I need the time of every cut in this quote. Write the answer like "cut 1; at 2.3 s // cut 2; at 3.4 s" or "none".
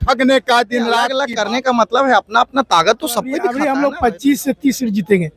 cut 1; at 1.2 s // cut 2; at 3.5 s